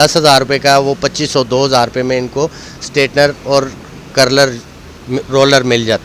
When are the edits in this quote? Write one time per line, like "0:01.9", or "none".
none